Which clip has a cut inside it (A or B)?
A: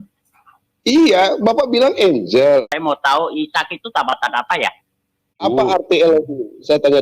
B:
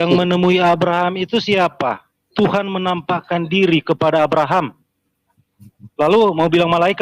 A